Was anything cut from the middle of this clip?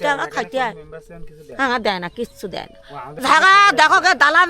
yes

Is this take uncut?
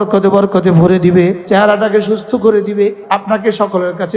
no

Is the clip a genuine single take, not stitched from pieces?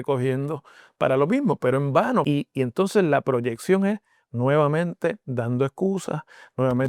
no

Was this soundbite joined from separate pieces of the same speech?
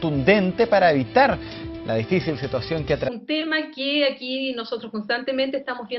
no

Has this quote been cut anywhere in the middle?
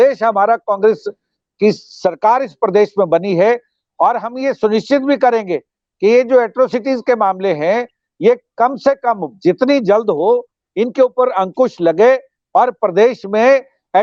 no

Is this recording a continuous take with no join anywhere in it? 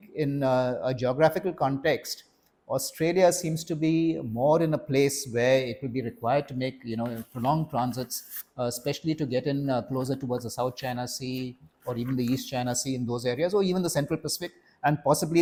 yes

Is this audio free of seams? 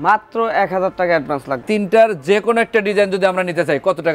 no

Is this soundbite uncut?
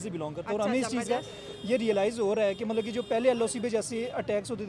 yes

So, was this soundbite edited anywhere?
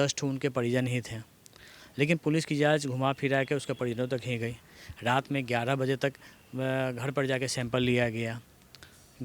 no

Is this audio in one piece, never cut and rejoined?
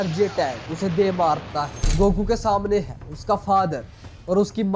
no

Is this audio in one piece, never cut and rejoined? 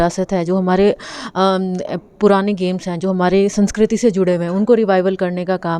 yes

